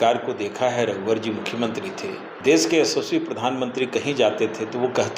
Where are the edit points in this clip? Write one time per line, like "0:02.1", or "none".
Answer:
0:02.3